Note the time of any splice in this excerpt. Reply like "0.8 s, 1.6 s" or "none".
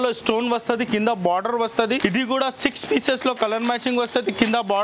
2.0 s